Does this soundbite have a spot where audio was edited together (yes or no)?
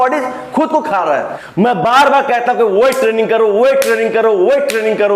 yes